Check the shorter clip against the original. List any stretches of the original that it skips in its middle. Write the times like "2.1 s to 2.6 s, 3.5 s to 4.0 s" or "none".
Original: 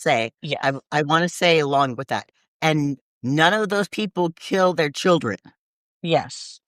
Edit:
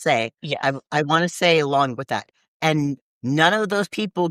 none